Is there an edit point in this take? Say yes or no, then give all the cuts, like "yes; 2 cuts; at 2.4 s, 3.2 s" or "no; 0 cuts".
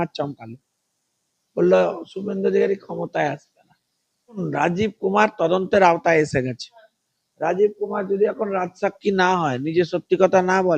yes; 1 cut; at 4.4 s